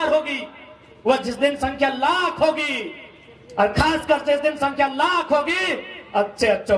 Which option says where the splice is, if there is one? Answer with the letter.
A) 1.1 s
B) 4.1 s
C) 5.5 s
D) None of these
D